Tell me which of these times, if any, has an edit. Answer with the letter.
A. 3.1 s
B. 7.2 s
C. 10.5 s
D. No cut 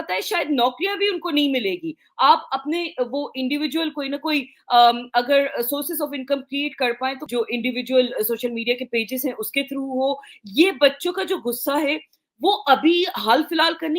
B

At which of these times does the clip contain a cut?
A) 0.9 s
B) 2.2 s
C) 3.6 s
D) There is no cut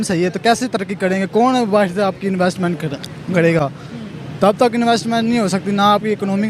D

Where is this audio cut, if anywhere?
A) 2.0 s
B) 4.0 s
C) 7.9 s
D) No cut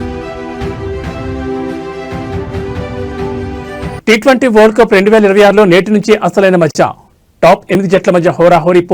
B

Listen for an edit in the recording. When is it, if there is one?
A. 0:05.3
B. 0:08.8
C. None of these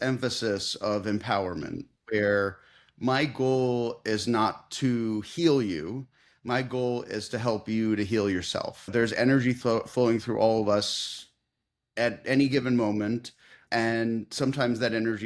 B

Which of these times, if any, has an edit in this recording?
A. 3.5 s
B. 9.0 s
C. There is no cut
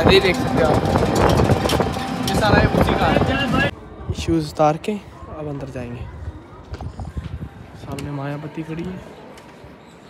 A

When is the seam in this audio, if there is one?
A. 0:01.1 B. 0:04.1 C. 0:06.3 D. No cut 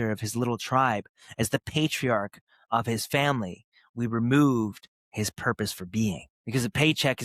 C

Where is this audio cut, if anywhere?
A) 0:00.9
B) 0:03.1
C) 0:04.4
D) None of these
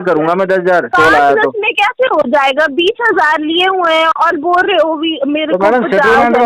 A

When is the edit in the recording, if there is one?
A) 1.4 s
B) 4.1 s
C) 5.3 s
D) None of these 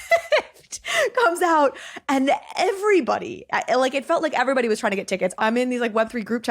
C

